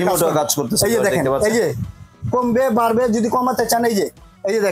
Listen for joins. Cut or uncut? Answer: uncut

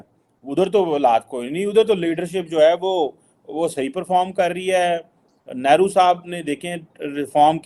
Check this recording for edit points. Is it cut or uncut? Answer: uncut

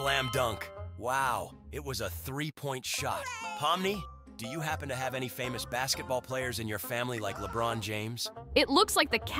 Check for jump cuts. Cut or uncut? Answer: uncut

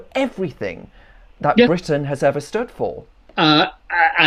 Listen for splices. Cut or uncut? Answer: uncut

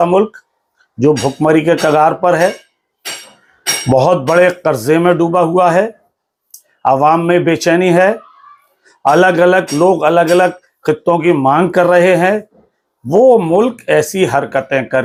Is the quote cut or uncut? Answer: uncut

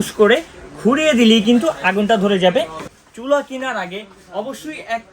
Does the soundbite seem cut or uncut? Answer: cut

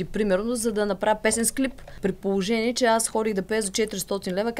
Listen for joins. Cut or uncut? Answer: cut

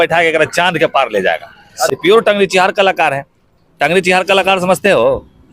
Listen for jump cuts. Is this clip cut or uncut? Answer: cut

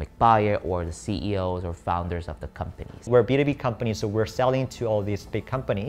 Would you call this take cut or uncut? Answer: cut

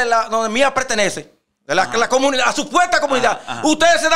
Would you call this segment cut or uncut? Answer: uncut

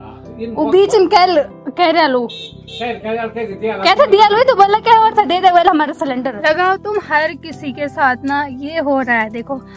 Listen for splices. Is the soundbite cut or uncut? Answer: cut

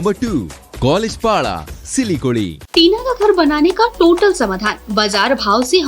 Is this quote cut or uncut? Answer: cut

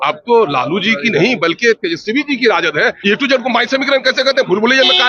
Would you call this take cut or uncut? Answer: cut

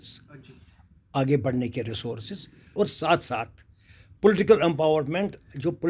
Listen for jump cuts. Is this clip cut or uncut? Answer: cut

